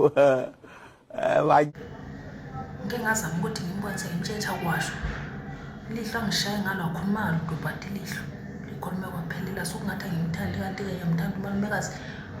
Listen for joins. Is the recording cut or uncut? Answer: cut